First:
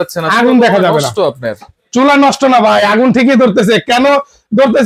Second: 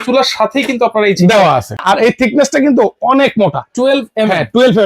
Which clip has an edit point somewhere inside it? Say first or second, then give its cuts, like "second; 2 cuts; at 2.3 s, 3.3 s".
second; 1 cut; at 1.8 s